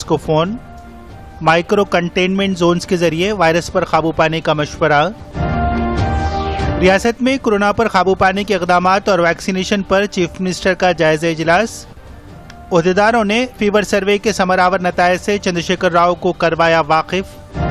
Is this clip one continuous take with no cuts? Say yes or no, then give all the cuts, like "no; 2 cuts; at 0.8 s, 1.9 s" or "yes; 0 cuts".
yes; 0 cuts